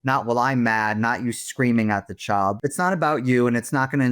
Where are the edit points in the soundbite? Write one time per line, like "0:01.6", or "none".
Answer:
0:02.6